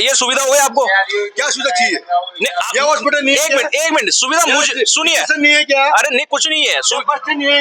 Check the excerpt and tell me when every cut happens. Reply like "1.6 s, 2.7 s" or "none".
none

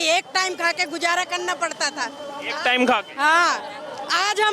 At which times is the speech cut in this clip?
none

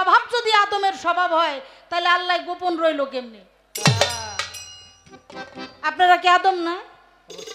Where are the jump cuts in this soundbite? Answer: none

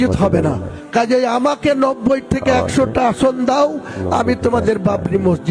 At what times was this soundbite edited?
none

